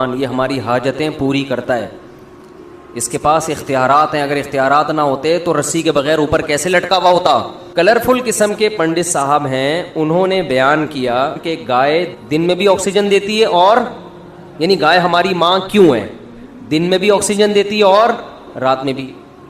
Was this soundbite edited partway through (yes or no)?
yes